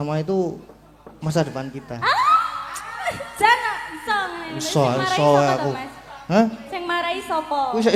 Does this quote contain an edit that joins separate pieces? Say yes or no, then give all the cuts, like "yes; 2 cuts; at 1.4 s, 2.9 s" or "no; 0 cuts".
no; 0 cuts